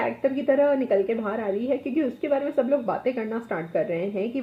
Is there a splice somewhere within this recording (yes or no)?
no